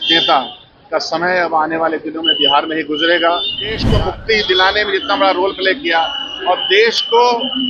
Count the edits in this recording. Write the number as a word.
one